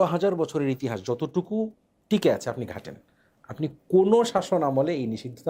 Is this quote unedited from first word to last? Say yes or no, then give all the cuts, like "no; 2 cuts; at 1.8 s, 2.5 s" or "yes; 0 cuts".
yes; 0 cuts